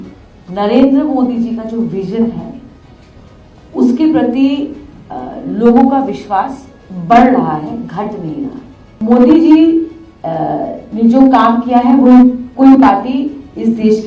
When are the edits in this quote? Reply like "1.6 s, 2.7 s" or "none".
8.9 s